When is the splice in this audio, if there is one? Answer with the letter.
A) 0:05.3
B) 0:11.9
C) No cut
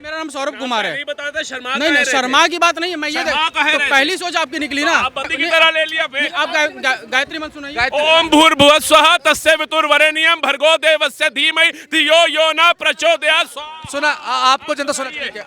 A